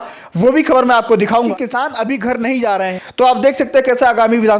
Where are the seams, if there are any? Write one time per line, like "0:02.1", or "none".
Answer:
0:01.5
0:02.9